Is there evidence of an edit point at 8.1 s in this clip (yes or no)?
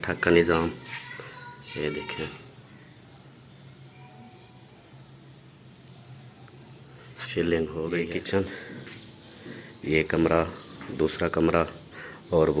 yes